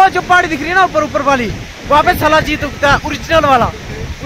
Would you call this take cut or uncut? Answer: uncut